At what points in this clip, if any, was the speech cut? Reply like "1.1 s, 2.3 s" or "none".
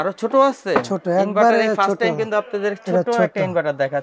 none